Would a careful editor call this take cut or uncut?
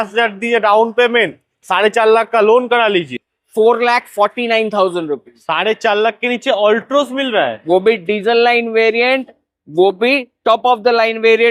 cut